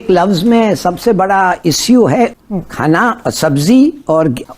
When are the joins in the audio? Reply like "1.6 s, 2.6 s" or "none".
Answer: 2.3 s